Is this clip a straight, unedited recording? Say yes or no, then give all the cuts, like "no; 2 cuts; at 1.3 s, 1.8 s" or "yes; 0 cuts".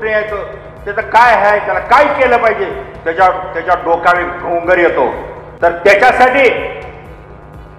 no; 1 cut; at 5.8 s